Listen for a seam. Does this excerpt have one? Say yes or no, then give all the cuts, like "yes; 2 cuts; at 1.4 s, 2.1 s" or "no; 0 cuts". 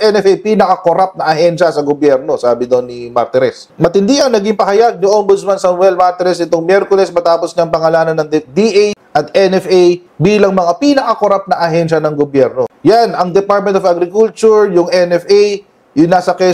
no; 0 cuts